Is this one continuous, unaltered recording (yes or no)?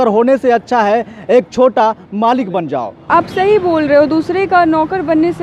no